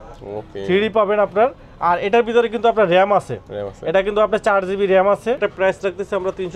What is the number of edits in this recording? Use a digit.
1